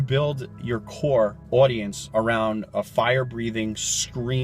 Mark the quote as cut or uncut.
cut